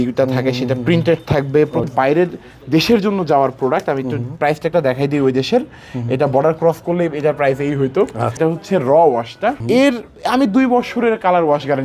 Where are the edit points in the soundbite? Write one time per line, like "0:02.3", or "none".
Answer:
0:01.9
0:08.4
0:09.6